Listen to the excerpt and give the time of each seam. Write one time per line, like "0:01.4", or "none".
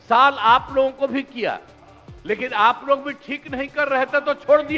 none